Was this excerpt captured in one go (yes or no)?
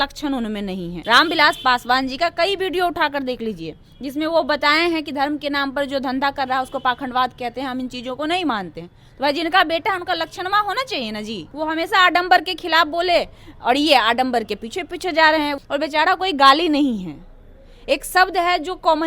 no